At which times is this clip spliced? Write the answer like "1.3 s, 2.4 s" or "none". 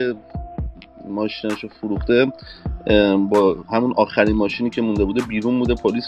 none

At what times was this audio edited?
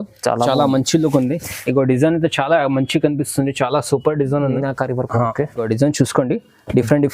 5.6 s

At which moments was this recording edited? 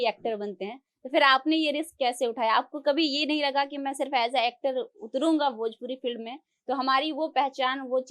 none

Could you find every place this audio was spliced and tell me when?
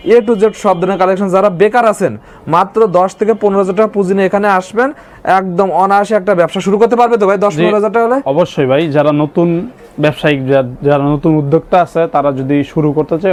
none

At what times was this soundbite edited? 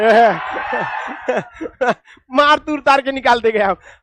none

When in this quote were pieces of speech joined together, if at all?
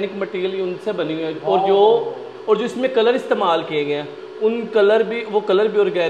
none

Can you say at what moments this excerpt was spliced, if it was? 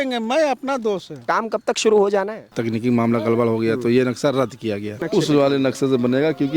1.2 s, 2.5 s, 5.0 s

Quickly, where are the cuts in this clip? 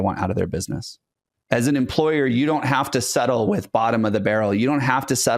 1.3 s

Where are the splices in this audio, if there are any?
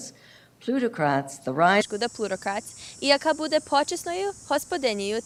none

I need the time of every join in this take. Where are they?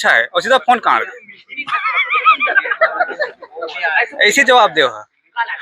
none

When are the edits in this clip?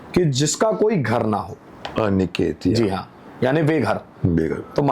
none

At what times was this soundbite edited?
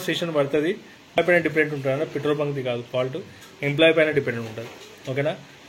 1.2 s

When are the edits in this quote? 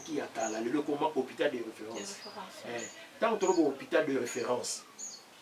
2.4 s

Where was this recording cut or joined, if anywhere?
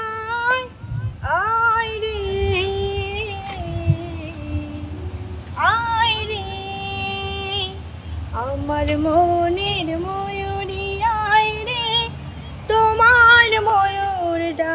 none

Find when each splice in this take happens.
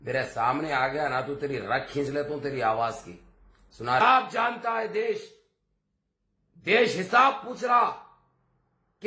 4.0 s

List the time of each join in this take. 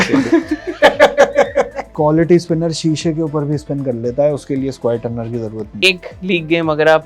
1.9 s, 5.8 s

